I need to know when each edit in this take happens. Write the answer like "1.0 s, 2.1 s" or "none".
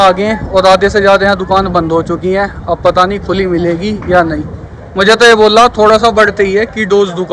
none